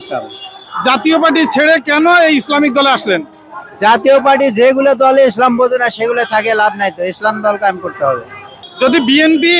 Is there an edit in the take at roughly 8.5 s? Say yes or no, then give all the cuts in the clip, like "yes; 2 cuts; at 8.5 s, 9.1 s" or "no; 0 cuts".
yes; 1 cut; at 8.5 s